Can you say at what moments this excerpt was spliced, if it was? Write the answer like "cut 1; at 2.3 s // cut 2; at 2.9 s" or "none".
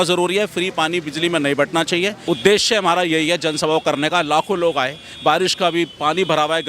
cut 1; at 2.2 s

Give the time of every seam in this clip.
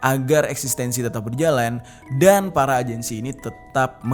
none

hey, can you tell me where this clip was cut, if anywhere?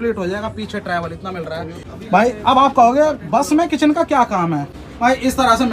cut 1; at 1.8 s // cut 2; at 4.7 s

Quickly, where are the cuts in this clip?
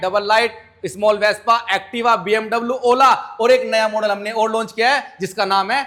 none

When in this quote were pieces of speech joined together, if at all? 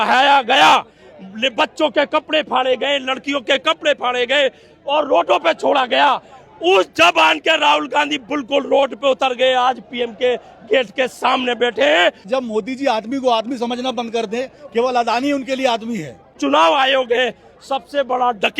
cut 1; at 12.3 s // cut 2; at 16.4 s

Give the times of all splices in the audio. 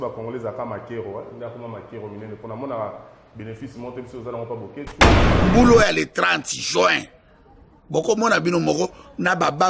cut 1; at 5.2 s

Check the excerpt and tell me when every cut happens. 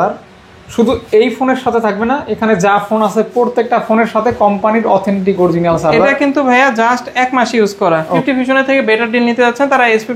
cut 1; at 8.2 s

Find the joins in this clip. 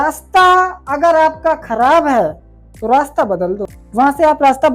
cut 1; at 3.7 s

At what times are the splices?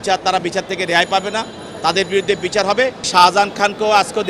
cut 1; at 3.0 s

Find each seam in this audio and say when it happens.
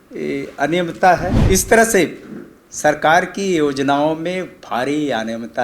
cut 1; at 1.4 s

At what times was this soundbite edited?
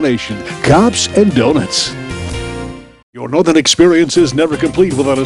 cut 1; at 2.7 s

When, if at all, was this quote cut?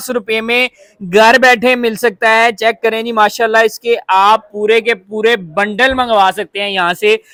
none

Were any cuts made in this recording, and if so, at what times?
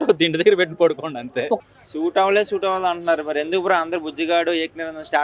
cut 1; at 1.6 s

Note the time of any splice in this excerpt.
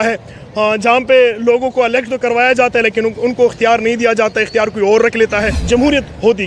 cut 1; at 5.5 s

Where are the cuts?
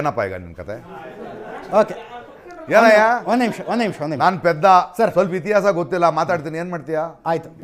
cut 1; at 3.6 s

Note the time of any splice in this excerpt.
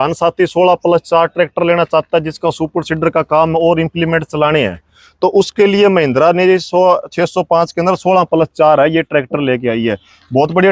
none

